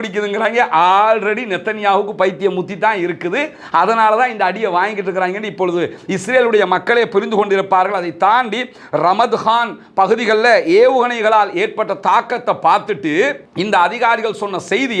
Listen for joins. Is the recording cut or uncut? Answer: uncut